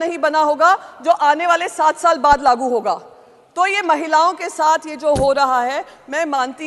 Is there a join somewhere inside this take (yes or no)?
no